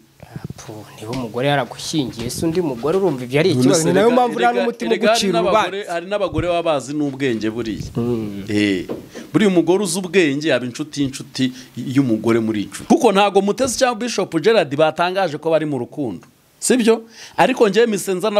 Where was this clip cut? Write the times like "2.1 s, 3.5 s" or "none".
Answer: 12.7 s